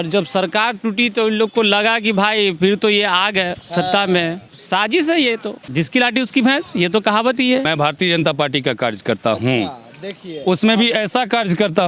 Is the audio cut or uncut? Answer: cut